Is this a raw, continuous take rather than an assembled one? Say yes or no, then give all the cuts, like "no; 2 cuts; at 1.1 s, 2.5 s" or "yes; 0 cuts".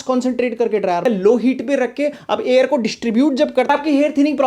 no; 2 cuts; at 1.0 s, 3.7 s